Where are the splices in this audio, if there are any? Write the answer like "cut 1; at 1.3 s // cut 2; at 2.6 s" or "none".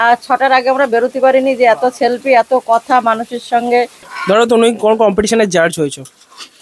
cut 1; at 4.1 s